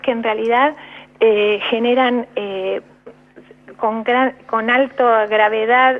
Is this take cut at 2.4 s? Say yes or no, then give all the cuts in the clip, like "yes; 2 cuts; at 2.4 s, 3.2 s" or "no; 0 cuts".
yes; 1 cut; at 2.4 s